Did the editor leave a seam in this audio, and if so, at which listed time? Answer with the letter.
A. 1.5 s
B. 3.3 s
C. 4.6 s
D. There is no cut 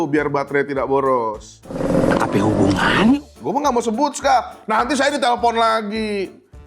B